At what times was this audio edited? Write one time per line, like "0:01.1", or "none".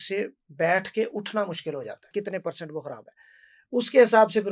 0:02.1